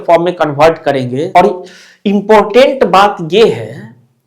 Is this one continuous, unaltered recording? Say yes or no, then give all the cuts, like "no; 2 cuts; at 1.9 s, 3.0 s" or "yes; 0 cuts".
no; 1 cut; at 1.3 s